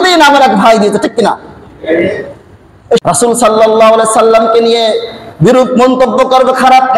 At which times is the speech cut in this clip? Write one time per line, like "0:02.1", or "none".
0:03.0